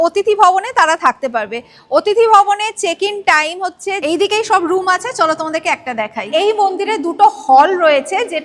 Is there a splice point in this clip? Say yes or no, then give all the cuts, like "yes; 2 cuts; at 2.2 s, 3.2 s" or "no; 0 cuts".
yes; 2 cuts; at 4.0 s, 6.3 s